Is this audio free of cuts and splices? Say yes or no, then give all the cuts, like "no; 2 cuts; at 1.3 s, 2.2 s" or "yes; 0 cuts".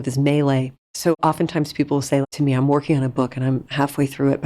no; 2 cuts; at 1.2 s, 2.2 s